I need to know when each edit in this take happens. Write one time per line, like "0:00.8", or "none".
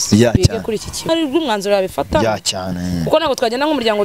0:01.1